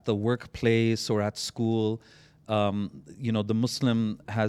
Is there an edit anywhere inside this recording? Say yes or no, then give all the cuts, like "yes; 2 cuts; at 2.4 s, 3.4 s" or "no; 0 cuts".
no; 0 cuts